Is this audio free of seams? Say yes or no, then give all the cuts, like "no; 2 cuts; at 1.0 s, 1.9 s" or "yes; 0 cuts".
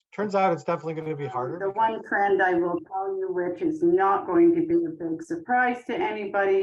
no; 1 cut; at 1.6 s